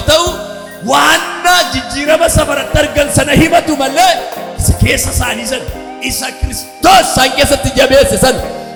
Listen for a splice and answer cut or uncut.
uncut